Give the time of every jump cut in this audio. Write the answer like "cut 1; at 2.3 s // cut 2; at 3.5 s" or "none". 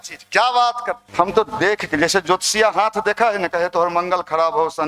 cut 1; at 1.0 s